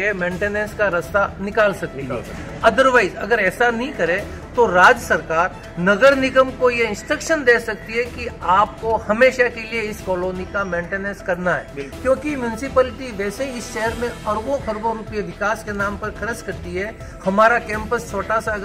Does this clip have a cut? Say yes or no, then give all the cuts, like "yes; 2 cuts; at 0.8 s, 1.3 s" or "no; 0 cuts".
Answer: no; 0 cuts